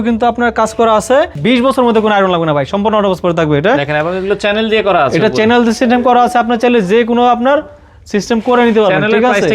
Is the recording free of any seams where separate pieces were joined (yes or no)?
no